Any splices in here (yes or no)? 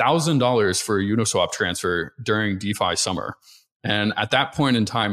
no